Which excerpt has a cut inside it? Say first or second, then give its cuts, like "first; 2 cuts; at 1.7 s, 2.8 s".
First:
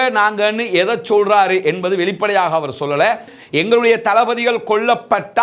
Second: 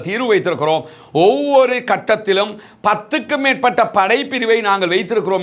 first; 1 cut; at 3.3 s